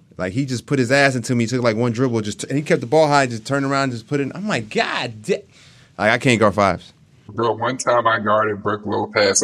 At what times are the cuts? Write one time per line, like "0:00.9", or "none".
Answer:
none

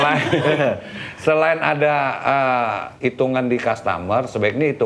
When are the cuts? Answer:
none

